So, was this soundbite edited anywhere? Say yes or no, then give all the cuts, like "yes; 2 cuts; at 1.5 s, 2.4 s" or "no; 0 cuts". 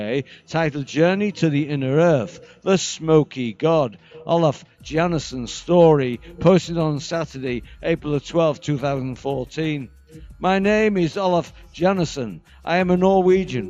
yes; 1 cut; at 2.1 s